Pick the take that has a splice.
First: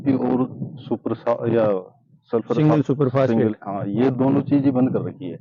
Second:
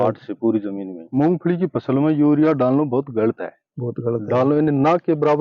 second; 1 cut; at 1.0 s

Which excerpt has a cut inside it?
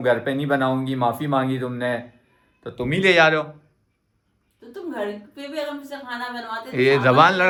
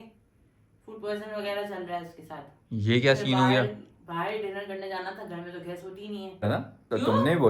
second; 1 cut; at 6.5 s

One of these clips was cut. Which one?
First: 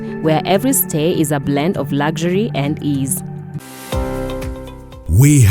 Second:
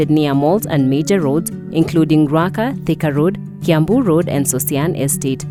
first; 1 cut; at 3.2 s

